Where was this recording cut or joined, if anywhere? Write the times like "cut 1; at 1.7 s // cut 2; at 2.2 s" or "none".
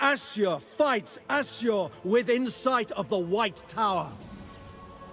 cut 1; at 4.1 s